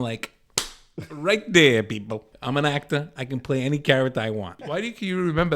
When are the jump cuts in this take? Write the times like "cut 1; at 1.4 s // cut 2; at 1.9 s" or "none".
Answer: cut 1; at 2.3 s // cut 2; at 4.6 s

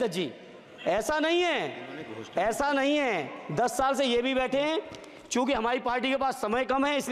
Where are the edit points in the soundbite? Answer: none

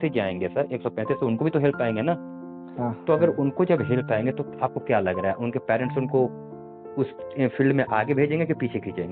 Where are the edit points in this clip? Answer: none

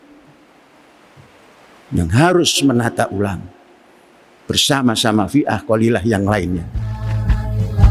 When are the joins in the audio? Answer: cut 1; at 6.8 s

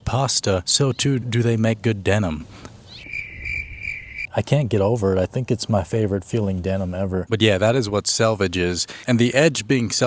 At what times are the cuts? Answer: cut 1; at 4.1 s // cut 2; at 7.3 s

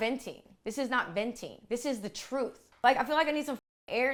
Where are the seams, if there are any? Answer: none

